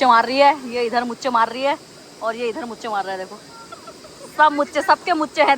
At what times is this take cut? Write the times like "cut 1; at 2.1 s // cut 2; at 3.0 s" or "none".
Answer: none